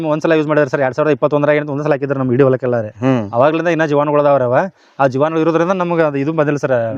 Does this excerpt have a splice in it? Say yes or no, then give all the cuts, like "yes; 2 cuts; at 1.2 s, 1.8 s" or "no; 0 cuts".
no; 0 cuts